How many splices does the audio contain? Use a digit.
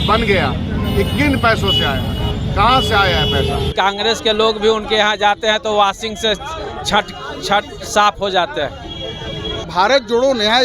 2